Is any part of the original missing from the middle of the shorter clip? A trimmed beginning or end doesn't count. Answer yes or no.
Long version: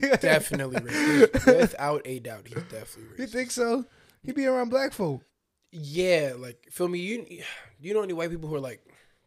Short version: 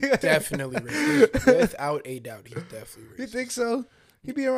no